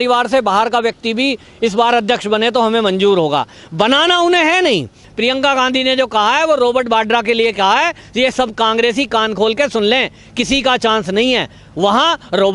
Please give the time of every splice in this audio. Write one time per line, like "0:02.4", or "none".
0:05.0